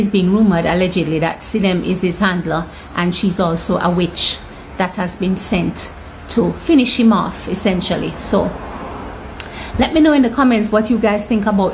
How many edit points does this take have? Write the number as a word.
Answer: zero